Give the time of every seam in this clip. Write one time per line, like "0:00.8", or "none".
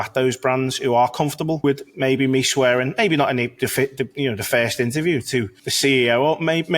0:01.6
0:05.6